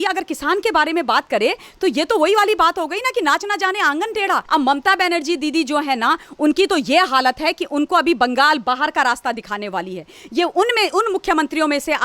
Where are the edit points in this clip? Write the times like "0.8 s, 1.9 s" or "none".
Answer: 4.4 s